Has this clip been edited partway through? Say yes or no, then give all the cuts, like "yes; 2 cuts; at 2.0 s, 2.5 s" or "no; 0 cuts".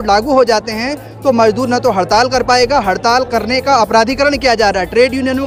no; 0 cuts